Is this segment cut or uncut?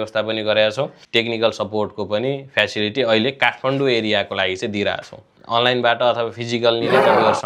cut